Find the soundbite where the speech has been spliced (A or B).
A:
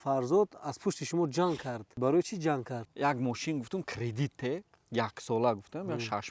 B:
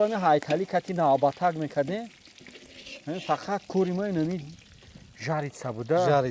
A